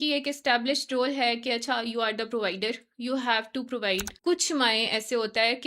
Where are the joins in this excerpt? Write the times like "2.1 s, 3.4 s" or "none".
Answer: 4.1 s

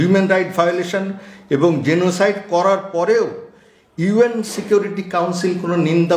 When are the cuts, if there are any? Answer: none

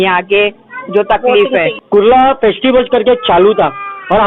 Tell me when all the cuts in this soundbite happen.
1.8 s

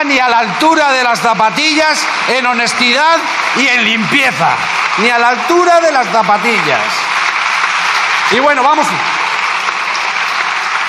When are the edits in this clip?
none

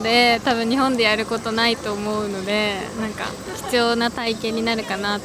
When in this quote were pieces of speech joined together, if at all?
none

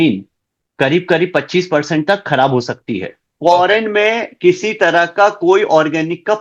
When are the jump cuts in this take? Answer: 3.2 s

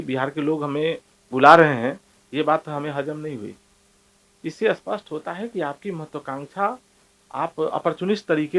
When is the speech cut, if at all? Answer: none

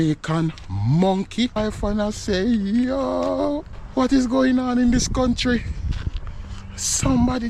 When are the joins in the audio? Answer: 1.6 s, 3.8 s

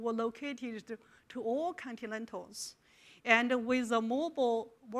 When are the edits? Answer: 2.0 s

